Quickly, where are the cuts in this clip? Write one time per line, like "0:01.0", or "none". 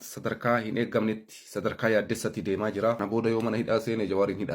0:03.0

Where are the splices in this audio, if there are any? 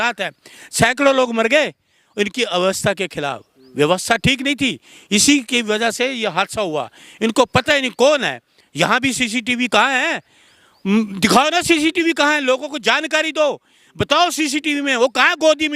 none

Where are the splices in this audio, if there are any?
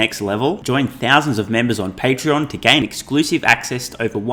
none

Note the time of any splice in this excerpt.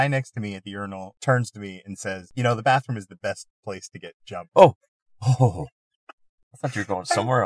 0:01.1
0:02.3

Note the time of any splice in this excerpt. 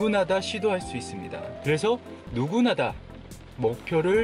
0:01.5

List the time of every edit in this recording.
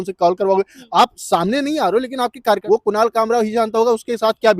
0:02.6

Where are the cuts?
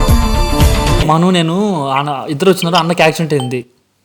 0:01.0

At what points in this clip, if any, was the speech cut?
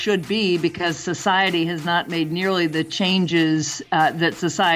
none

